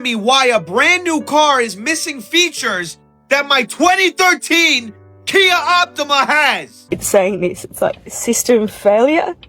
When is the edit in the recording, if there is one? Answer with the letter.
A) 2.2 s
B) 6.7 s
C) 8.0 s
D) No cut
B